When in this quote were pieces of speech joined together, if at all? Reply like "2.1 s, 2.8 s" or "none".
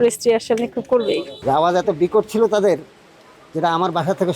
1.4 s

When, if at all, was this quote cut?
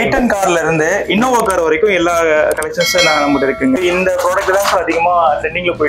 3.8 s

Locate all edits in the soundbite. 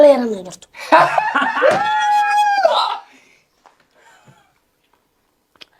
none

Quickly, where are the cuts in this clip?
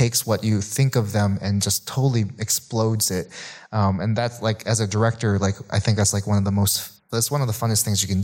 none

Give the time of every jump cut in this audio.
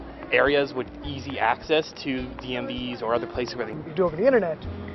1.9 s, 3.8 s

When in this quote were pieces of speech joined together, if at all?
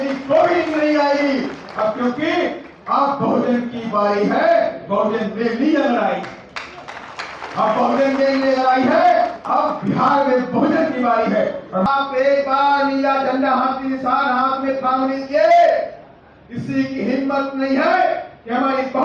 11.9 s

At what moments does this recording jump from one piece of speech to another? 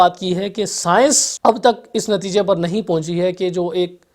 1.3 s

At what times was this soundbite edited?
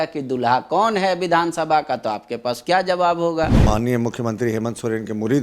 3.6 s

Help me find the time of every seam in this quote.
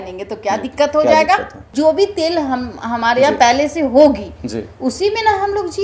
none

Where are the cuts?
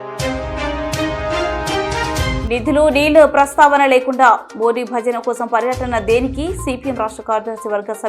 2.2 s

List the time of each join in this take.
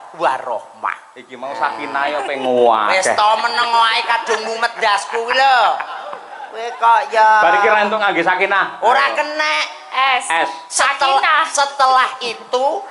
none

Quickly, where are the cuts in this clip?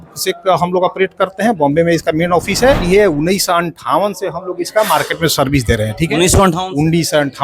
2.8 s

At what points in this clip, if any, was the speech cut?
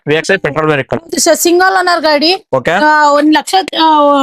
none

